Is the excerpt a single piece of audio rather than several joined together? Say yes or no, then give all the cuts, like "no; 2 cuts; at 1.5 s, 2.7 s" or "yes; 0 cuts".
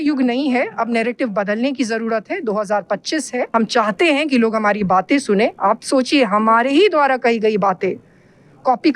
yes; 0 cuts